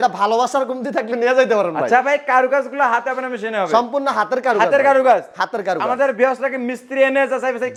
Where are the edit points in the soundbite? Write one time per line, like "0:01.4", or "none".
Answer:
none

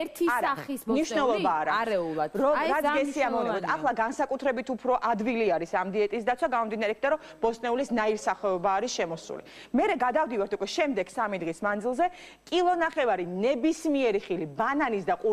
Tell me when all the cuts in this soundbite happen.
0:03.9

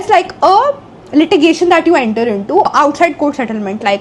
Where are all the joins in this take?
0:02.7

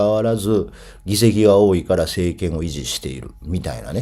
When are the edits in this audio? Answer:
none

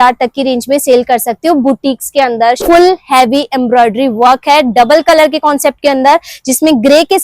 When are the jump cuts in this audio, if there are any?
0:02.6

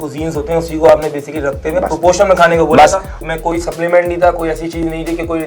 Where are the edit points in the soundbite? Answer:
0:03.2

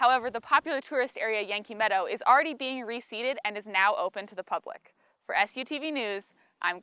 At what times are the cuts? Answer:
none

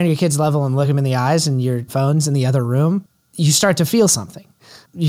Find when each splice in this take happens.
0:00.9
0:01.8
0:03.2

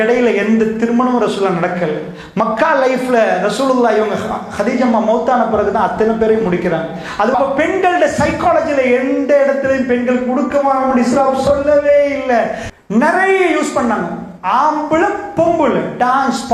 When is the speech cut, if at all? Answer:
0:07.3
0:12.6

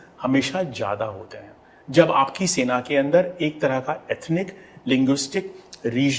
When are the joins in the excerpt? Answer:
none

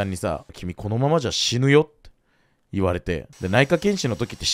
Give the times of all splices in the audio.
none

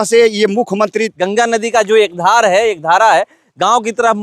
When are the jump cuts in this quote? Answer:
0:01.2

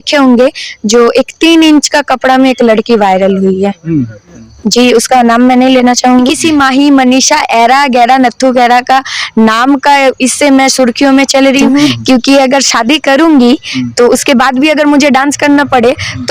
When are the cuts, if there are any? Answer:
0:06.4
0:12.0

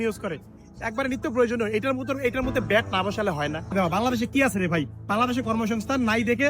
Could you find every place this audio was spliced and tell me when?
0:03.7

